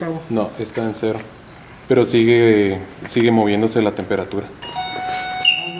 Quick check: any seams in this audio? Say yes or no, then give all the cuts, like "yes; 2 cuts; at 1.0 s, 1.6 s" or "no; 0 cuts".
yes; 1 cut; at 4.6 s